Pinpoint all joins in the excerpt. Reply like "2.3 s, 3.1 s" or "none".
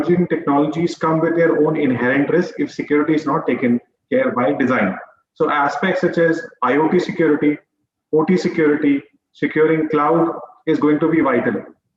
none